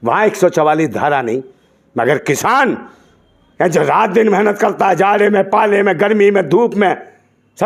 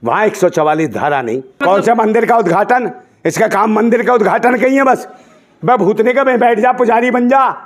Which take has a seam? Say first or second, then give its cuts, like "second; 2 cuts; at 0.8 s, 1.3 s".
second; 1 cut; at 1.6 s